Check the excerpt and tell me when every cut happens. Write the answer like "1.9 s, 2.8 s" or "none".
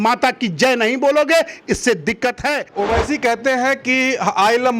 2.7 s